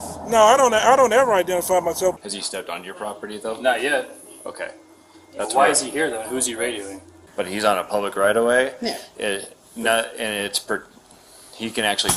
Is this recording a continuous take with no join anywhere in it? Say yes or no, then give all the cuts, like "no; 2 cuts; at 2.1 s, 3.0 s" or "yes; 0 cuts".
no; 2 cuts; at 2.2 s, 7.2 s